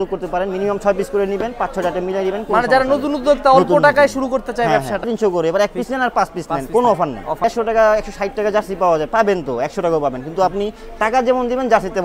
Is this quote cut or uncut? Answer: cut